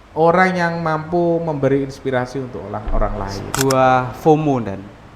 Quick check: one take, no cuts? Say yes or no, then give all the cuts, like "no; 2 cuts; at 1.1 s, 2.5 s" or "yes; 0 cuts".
no; 1 cut; at 3.5 s